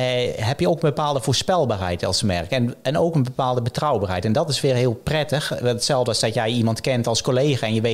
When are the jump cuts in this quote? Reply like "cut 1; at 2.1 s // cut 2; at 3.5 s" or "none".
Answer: none